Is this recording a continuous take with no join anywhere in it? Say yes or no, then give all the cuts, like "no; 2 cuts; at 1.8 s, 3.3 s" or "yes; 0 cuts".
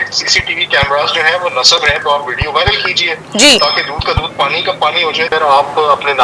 no; 2 cuts; at 2.0 s, 5.3 s